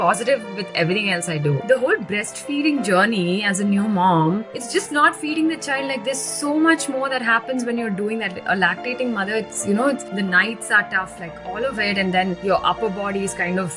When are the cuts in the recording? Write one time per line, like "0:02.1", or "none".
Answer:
0:01.6